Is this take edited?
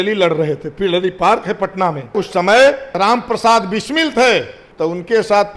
yes; 3 cuts; at 2.1 s, 2.9 s, 4.6 s

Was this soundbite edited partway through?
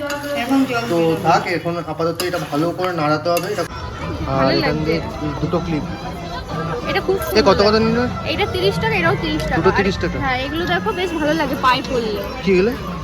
yes; 1 cut; at 3.8 s

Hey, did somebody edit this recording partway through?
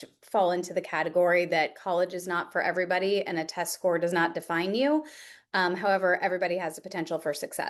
no; 0 cuts

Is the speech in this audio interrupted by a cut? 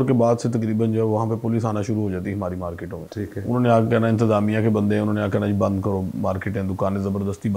yes; 1 cut; at 3.0 s

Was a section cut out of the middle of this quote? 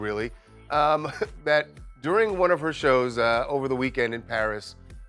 no; 0 cuts

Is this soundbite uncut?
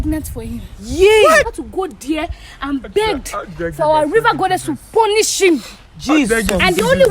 no; 1 cut; at 1.5 s

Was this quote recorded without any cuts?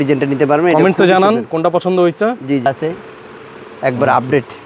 no; 1 cut; at 2.7 s

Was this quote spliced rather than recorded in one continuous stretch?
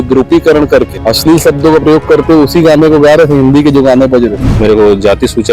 yes; 2 cuts; at 0.9 s, 4.5 s

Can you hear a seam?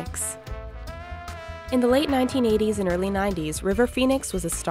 yes; 1 cut; at 1.3 s

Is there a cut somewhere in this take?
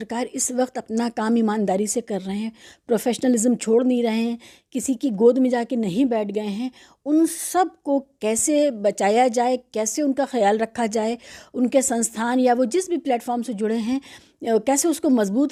no; 0 cuts

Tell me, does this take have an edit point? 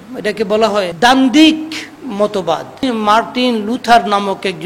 yes; 2 cuts; at 0.9 s, 2.8 s

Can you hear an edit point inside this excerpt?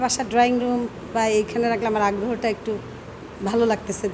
no; 0 cuts

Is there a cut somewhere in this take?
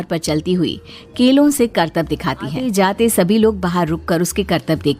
yes; 1 cut; at 2.6 s

